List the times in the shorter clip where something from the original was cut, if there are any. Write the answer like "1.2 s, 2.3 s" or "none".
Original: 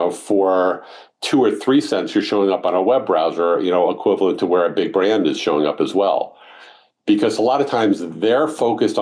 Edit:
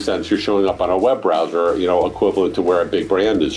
none